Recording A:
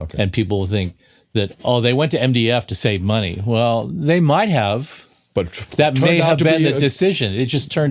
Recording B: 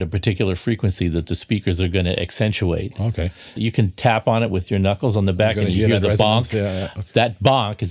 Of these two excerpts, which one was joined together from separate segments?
B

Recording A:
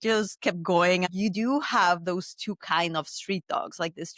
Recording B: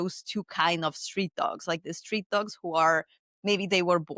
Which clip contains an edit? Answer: A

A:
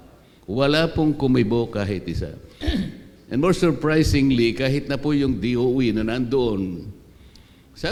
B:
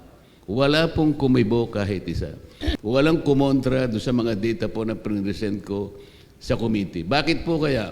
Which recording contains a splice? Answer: B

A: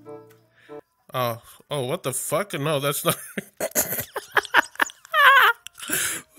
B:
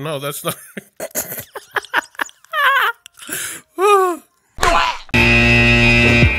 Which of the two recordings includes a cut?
B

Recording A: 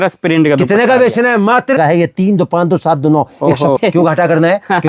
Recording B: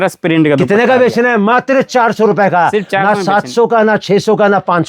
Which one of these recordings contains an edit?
A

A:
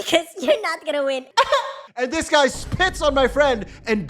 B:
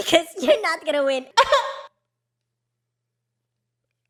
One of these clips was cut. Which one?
A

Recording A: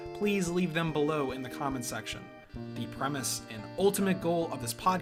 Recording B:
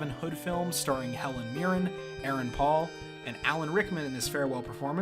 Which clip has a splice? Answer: B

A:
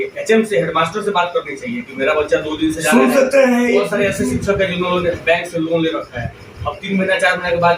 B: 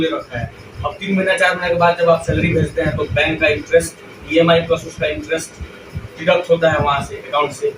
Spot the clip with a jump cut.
A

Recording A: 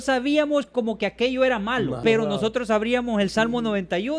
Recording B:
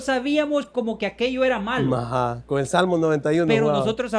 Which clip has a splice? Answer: A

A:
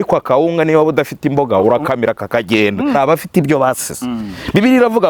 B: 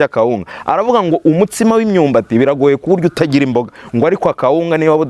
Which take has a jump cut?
A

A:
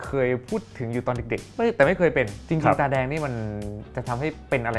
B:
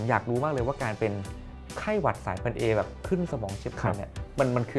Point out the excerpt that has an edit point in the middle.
A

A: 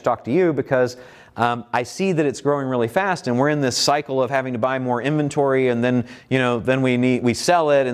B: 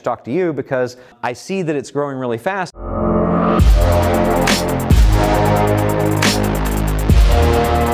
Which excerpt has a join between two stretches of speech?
B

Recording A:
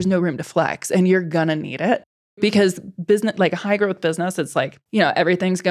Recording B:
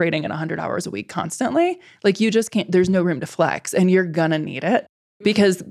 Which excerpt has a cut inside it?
A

